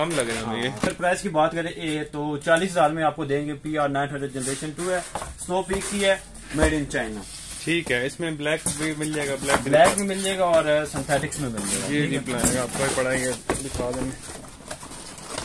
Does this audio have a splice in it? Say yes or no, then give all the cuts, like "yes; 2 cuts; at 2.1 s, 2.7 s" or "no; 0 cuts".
yes; 1 cut; at 0.9 s